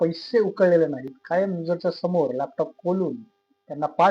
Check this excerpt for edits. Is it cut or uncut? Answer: uncut